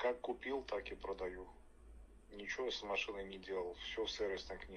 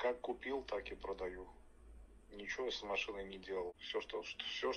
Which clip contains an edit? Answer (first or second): second